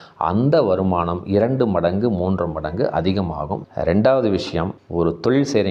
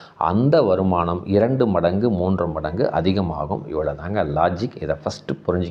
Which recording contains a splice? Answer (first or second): first